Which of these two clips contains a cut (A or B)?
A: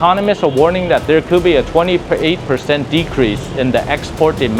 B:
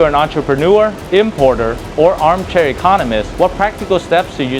B